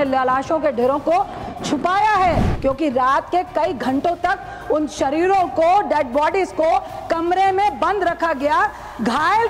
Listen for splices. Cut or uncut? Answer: cut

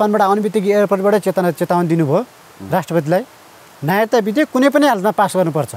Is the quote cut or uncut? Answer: uncut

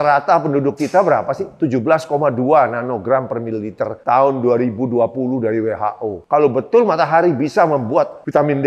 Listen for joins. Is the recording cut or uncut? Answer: uncut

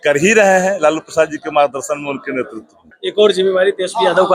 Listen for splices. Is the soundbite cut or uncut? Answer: cut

